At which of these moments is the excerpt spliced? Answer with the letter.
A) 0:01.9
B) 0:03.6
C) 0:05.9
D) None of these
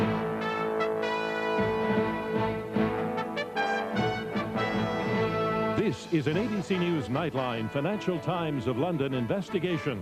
B